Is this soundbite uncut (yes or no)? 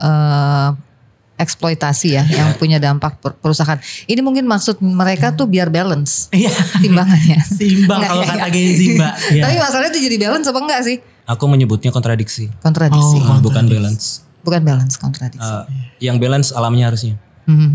no